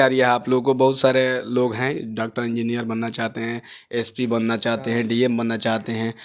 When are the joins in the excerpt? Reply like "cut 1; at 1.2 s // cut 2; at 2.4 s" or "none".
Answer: none